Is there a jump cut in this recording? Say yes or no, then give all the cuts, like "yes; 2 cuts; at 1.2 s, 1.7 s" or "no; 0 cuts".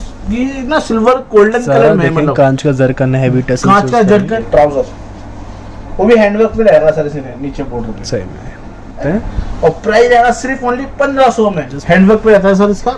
yes; 3 cuts; at 4.3 s, 9.0 s, 11.7 s